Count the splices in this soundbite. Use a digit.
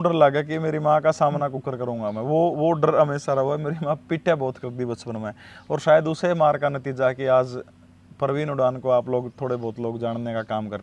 0